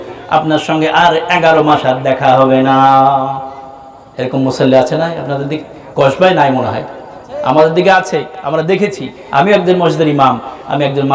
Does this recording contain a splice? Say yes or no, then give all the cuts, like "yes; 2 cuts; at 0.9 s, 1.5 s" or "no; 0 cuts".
no; 0 cuts